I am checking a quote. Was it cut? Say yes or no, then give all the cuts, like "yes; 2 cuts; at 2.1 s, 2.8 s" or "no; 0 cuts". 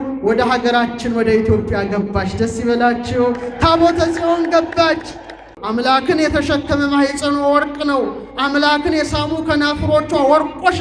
yes; 1 cut; at 5.5 s